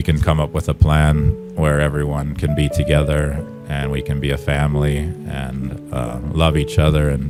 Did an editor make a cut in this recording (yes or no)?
no